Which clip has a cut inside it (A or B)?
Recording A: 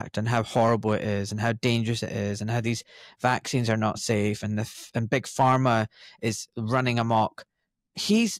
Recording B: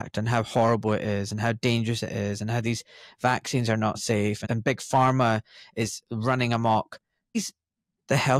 B